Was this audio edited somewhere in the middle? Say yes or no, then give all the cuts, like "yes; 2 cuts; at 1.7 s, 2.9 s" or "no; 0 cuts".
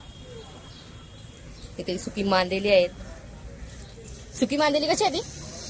no; 0 cuts